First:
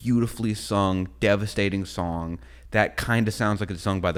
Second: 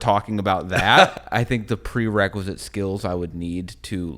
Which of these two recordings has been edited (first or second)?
second